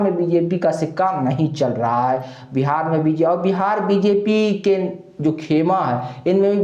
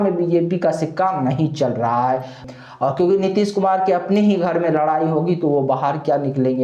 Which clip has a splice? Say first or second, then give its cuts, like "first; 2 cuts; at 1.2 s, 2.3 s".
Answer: second; 1 cut; at 2.4 s